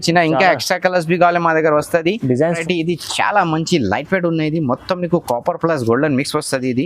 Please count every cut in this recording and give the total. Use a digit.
1